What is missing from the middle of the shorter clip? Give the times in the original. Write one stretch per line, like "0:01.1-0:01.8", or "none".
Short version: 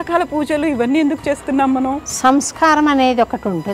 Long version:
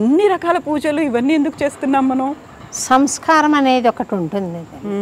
0:02.4-0:02.7